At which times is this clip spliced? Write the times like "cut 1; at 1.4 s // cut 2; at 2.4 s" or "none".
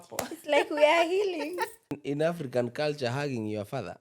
cut 1; at 2.0 s